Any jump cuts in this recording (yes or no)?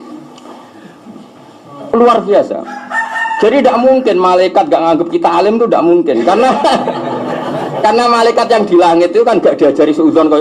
no